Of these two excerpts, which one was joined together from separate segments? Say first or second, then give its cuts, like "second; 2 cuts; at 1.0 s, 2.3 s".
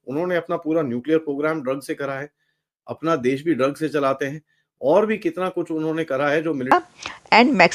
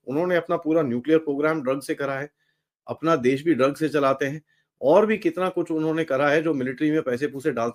first; 1 cut; at 6.7 s